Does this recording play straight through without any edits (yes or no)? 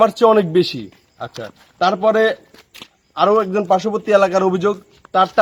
yes